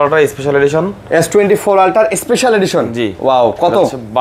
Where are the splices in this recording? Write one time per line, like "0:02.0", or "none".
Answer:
none